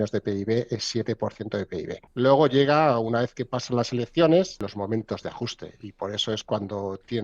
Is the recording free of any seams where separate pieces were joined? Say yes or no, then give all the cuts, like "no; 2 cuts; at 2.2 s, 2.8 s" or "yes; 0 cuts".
no; 2 cuts; at 2.0 s, 4.6 s